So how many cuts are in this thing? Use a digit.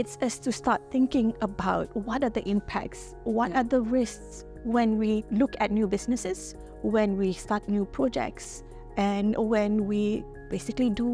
0